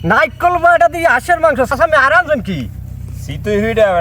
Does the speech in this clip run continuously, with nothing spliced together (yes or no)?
no